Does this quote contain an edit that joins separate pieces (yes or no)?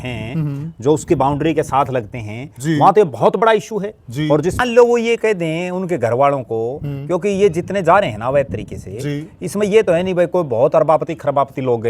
yes